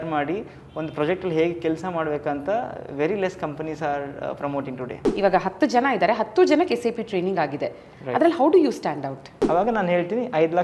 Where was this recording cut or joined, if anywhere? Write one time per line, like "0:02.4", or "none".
0:05.1
0:09.5